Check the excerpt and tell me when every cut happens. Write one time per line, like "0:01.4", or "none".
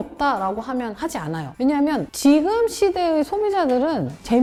none